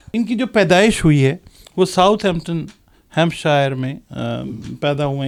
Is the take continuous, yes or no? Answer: yes